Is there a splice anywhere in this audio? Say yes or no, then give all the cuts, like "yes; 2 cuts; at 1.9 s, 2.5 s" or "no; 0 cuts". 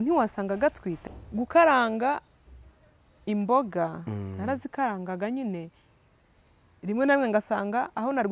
yes; 1 cut; at 1.0 s